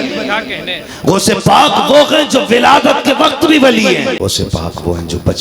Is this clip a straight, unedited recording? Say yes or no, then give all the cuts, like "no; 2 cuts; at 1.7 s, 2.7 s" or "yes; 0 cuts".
no; 1 cut; at 4.2 s